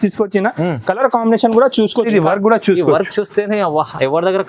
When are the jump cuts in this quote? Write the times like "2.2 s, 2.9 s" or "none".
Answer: 2.1 s